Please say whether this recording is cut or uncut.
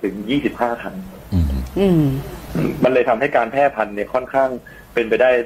uncut